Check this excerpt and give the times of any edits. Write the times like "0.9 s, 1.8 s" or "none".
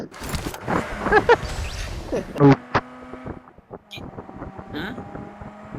2.4 s